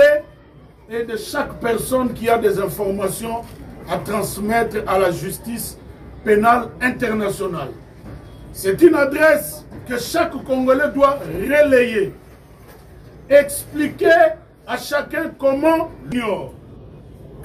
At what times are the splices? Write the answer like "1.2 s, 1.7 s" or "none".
16.1 s